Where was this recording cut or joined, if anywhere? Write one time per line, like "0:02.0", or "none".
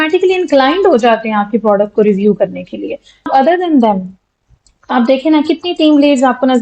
0:03.3